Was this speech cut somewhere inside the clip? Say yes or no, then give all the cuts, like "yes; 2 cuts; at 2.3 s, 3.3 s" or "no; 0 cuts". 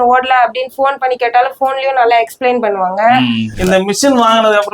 yes; 1 cut; at 3.5 s